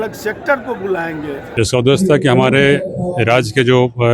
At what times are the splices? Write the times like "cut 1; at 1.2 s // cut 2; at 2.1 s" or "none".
cut 1; at 1.4 s